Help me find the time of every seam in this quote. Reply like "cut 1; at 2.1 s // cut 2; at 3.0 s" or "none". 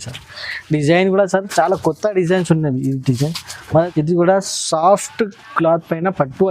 cut 1; at 3.5 s